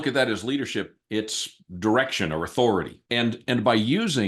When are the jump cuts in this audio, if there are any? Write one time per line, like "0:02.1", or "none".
0:03.0

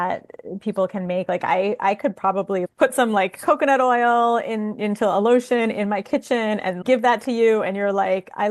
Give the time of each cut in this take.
none

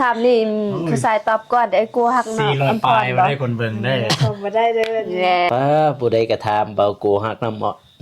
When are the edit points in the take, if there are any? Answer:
0:05.5

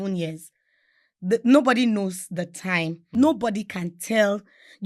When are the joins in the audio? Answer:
0:03.0

